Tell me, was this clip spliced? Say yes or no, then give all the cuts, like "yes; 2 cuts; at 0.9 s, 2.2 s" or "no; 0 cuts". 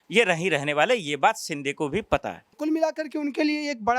yes; 1 cut; at 2.5 s